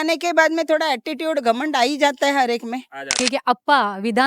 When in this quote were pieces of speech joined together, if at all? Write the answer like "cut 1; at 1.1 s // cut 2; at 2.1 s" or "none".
cut 1; at 3.2 s